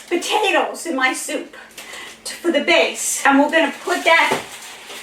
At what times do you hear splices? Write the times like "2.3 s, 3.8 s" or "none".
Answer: 3.1 s